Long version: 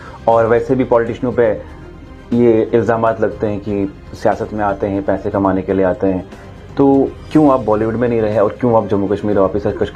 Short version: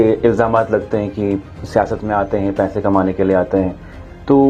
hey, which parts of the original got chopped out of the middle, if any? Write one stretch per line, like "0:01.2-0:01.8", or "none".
none